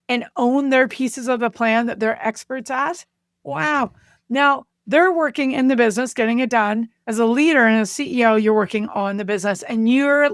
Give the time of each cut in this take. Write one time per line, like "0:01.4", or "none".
0:07.0